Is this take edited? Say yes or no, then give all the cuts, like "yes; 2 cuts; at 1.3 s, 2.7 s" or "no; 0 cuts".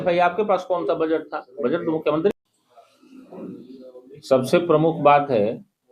yes; 1 cut; at 2.3 s